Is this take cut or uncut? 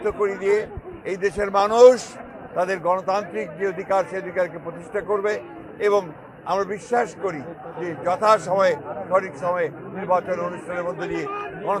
uncut